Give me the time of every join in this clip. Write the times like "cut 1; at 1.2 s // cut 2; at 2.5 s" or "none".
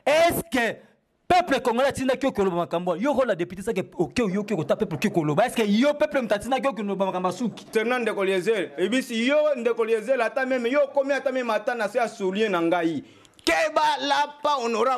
cut 1; at 7.7 s